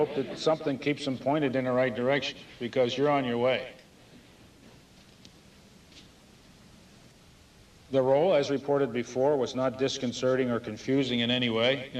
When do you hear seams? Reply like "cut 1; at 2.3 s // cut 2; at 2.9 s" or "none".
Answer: cut 1; at 9.3 s